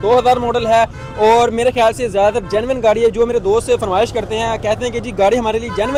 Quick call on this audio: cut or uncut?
uncut